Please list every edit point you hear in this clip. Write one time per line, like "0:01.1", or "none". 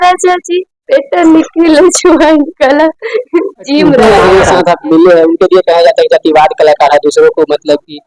0:04.0